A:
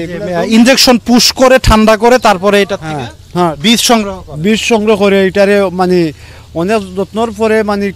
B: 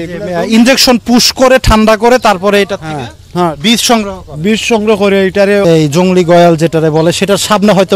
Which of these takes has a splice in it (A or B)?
B